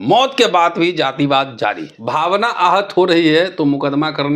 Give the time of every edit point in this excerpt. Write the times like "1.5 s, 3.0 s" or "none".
1.9 s